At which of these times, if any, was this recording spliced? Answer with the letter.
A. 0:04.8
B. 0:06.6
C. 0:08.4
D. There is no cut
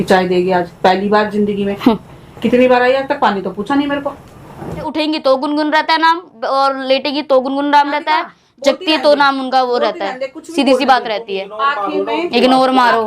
A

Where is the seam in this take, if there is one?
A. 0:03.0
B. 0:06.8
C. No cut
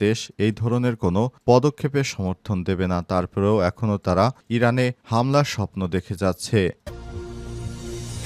B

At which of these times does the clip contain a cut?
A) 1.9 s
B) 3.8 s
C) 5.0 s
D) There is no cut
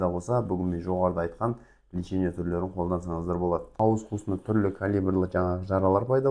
B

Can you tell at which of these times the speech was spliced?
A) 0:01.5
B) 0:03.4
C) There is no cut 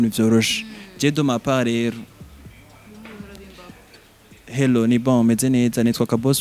C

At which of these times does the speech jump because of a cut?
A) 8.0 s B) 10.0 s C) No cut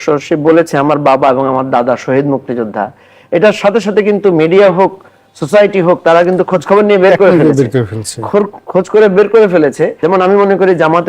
B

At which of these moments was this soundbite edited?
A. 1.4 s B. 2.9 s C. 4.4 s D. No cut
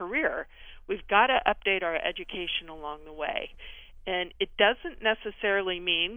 D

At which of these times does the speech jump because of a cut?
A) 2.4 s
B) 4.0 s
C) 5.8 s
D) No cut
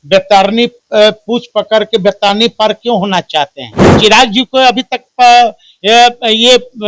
B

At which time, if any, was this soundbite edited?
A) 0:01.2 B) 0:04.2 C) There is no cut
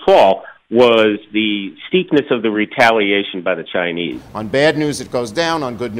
B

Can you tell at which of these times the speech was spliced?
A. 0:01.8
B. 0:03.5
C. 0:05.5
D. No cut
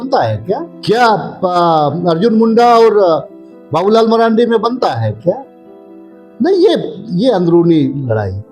D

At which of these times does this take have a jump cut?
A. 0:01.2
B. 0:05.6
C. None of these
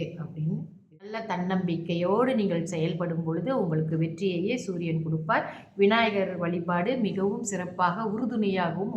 A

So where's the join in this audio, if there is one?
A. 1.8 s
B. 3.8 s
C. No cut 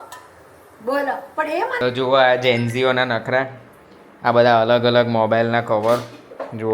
A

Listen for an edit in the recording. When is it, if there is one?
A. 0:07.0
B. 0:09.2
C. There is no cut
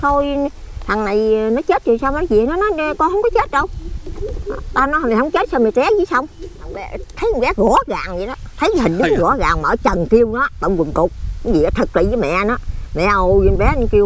A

